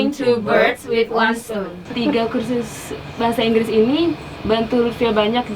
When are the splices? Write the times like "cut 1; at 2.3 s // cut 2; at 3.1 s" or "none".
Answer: cut 1; at 1.8 s